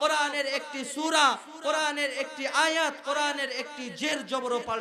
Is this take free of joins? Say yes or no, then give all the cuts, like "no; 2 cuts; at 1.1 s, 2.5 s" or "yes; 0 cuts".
yes; 0 cuts